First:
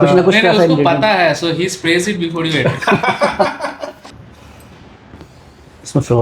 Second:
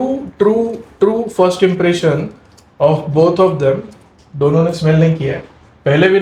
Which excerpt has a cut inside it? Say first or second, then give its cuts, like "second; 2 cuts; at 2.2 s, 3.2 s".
first; 1 cut; at 4.0 s